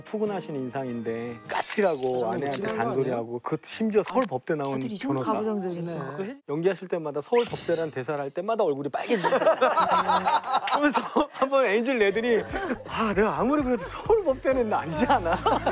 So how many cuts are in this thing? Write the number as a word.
two